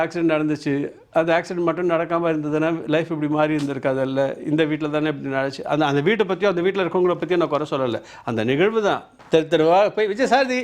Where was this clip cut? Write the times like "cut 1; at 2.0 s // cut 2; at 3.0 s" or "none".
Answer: cut 1; at 9.1 s